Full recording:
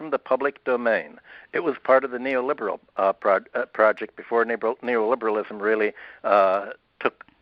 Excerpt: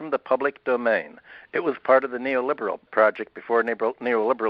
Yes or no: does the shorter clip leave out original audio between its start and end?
yes